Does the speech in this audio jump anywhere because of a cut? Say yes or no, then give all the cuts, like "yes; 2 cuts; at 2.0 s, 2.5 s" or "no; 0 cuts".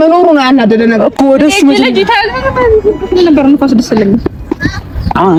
no; 0 cuts